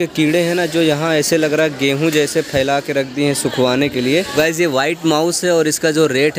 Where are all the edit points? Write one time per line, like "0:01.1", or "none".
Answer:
0:04.3